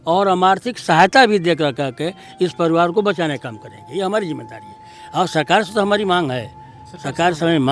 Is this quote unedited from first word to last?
yes; 0 cuts

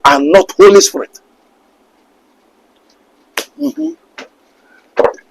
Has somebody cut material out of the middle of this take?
no; 0 cuts

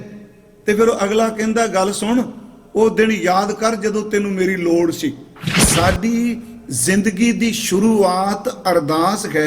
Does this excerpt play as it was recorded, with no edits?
no; 1 cut; at 5.6 s

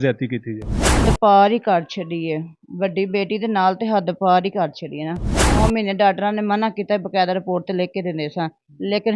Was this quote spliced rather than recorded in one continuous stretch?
yes; 2 cuts; at 1.0 s, 5.6 s

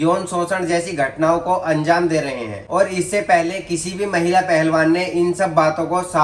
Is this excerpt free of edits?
yes; 0 cuts

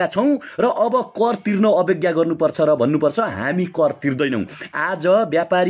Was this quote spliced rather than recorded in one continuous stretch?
no; 0 cuts

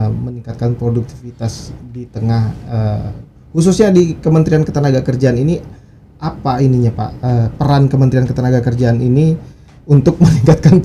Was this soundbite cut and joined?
no; 0 cuts

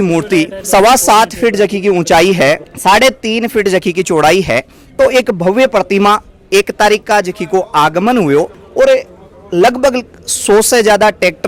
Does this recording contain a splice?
no; 0 cuts

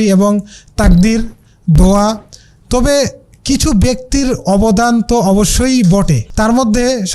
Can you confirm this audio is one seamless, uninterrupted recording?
no; 1 cut; at 6.2 s

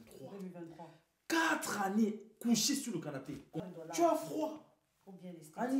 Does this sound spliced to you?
yes; 1 cut; at 3.6 s

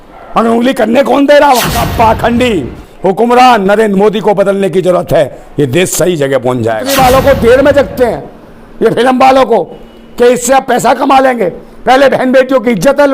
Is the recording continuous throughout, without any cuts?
no; 2 cuts; at 1.9 s, 6.8 s

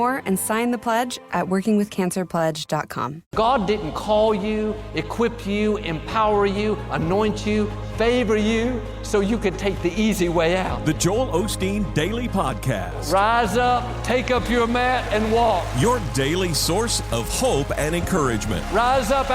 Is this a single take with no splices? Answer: no; 2 cuts; at 1.1 s, 3.2 s

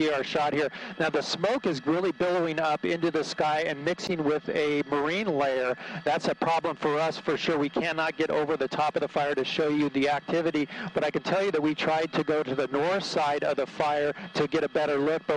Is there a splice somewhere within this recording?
no; 0 cuts

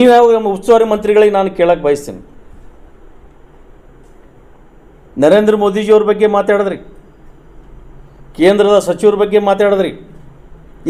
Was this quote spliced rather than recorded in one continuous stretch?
no; 0 cuts

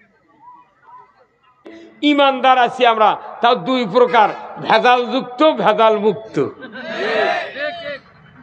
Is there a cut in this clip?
yes; 1 cut; at 1.8 s

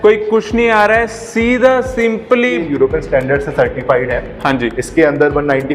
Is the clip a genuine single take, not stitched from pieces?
no; 1 cut; at 2.6 s

